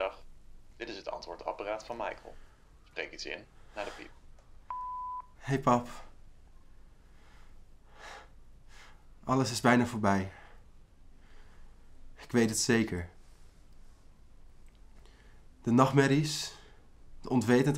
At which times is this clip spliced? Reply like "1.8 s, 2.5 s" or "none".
5.3 s